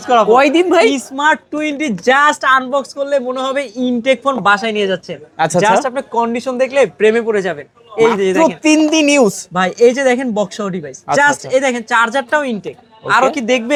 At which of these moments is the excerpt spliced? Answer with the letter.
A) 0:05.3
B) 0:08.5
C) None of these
C